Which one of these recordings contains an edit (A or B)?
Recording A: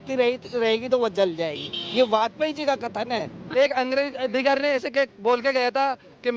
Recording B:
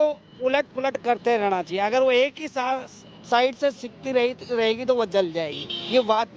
A